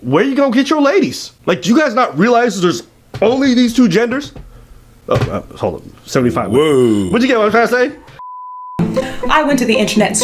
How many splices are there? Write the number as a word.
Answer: one